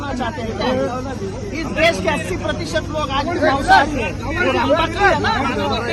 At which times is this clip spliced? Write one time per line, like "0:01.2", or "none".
none